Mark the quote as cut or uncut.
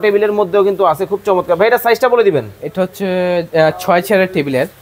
uncut